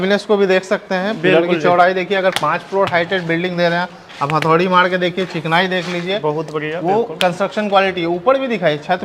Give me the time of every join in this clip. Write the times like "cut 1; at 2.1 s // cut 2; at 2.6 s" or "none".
none